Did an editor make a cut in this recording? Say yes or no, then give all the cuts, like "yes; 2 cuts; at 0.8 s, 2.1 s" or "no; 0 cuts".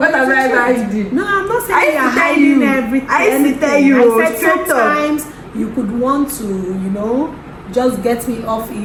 no; 0 cuts